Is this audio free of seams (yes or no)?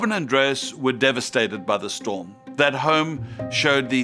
yes